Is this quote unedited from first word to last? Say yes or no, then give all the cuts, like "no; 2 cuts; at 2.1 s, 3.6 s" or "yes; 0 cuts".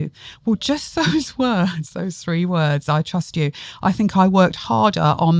yes; 0 cuts